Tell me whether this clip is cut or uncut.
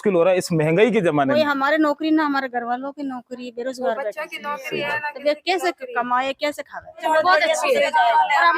cut